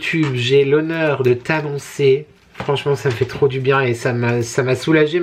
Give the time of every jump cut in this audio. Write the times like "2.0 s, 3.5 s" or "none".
none